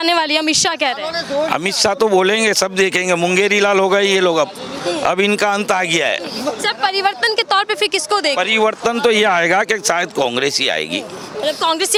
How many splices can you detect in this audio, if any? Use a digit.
0